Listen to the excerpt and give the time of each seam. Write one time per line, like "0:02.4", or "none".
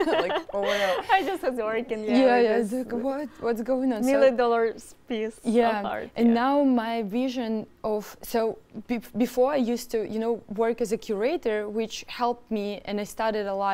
none